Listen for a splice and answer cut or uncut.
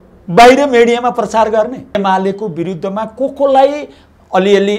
cut